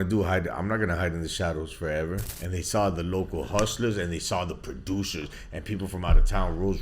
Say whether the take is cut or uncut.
cut